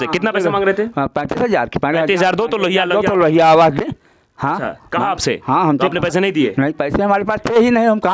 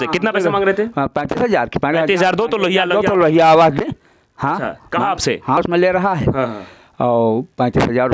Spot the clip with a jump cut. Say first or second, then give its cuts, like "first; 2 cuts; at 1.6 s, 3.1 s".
second; 1 cut; at 5.6 s